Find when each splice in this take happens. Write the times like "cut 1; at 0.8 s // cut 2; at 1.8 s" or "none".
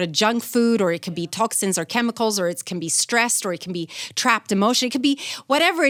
none